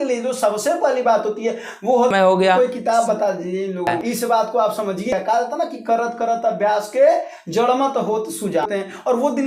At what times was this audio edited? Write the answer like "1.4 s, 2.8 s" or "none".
2.1 s, 4.0 s, 5.1 s, 8.7 s